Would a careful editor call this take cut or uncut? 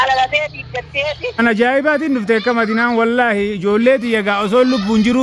cut